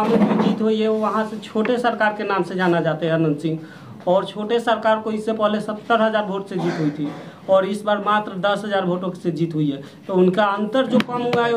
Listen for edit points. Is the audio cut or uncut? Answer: uncut